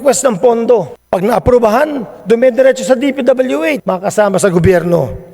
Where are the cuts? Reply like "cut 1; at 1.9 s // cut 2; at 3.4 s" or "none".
cut 1; at 1.0 s // cut 2; at 3.8 s